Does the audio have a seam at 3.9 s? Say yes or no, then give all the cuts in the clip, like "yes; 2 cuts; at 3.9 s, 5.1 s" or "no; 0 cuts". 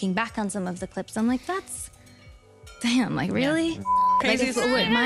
yes; 2 cuts; at 2.8 s, 3.9 s